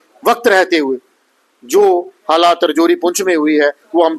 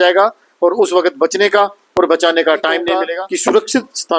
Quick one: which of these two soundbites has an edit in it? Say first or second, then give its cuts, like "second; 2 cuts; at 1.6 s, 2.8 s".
second; 1 cut; at 3.0 s